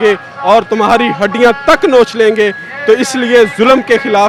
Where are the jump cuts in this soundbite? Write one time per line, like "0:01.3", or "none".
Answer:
none